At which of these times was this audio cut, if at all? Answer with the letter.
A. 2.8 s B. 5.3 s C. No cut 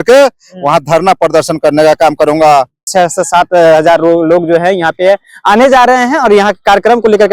A